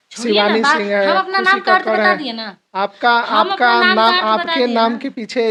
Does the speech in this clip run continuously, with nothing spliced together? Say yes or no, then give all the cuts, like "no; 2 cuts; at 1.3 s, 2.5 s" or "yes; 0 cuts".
yes; 0 cuts